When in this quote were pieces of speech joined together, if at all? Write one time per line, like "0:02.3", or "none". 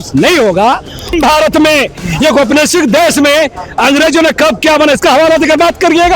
0:01.1